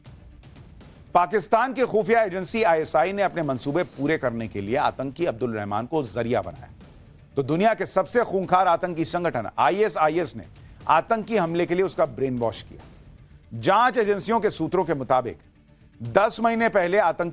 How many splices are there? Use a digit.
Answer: 0